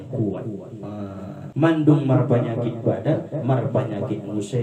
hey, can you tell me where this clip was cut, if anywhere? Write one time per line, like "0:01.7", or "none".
0:01.5

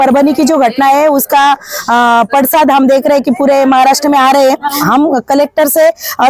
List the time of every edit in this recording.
0:04.8

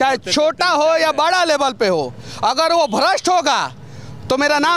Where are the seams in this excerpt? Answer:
none

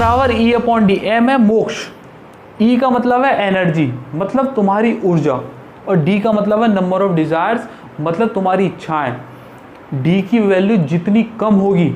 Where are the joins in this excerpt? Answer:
none

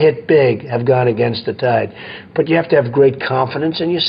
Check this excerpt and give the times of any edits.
none

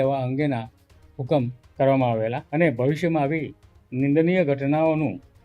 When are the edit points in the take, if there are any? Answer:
0:02.4

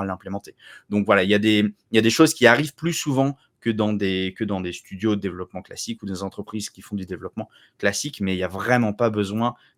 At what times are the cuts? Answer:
none

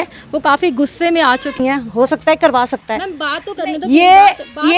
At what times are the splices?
0:01.6

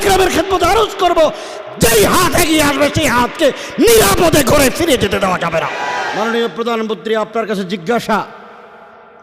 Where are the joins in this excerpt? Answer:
0:06.1

